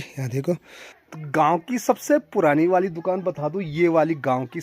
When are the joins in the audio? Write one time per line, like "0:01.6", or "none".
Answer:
0:01.0